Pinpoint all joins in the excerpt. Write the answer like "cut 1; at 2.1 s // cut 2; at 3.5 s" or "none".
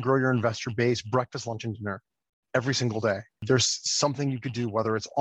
cut 1; at 3.4 s